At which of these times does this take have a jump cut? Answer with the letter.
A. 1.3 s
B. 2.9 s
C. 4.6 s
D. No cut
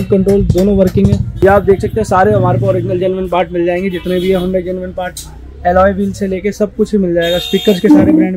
A